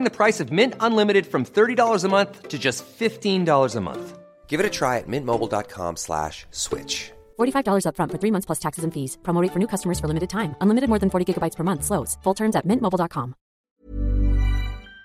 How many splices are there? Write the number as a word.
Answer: one